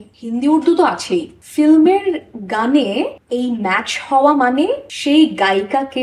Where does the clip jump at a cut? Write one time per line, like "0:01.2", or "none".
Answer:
0:01.4
0:04.9